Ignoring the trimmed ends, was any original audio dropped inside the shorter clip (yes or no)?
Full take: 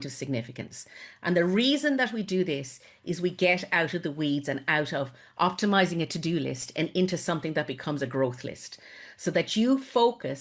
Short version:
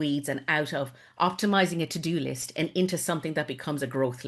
no